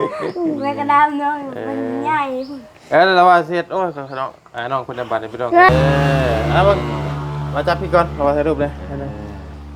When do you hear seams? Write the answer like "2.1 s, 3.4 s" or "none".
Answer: 5.7 s